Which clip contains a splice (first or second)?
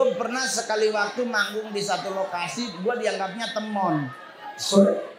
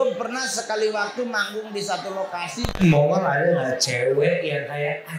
second